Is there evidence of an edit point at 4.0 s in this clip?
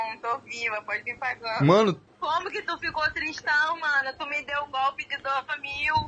no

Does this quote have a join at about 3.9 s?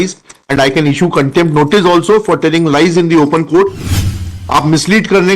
yes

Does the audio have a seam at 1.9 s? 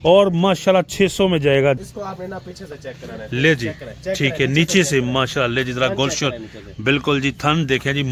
yes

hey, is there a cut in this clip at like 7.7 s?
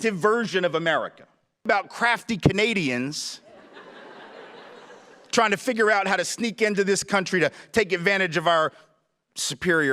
no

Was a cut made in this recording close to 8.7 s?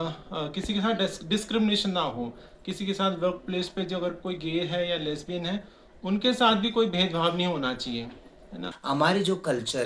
yes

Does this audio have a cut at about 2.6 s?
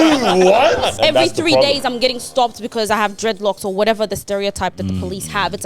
no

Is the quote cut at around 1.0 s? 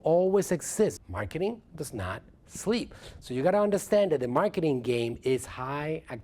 yes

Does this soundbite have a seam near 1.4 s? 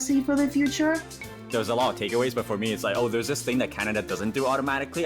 yes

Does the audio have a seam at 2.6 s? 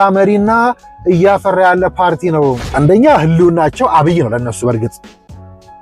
yes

